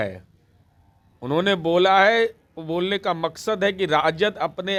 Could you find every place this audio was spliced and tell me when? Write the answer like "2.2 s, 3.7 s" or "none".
none